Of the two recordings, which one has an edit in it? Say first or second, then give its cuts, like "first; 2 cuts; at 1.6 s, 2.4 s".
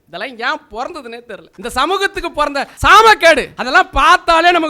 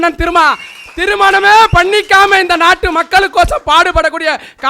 first; 3 cuts; at 1.4 s, 2.7 s, 3.5 s